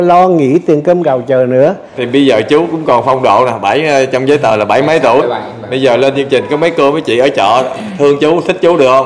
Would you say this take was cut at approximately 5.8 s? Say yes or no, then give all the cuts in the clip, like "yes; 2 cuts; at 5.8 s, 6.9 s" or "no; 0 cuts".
no; 1 cut; at 2.0 s